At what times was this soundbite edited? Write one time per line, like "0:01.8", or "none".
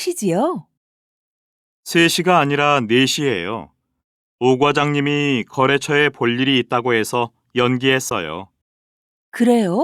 0:07.6